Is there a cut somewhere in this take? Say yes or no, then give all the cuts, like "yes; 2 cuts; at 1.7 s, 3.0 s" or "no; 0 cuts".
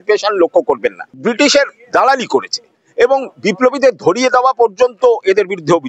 yes; 1 cut; at 1.1 s